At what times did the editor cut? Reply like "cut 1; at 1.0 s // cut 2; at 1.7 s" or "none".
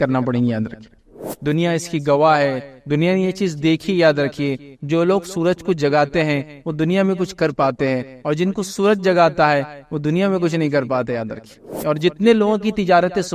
cut 1; at 1.1 s // cut 2; at 11.7 s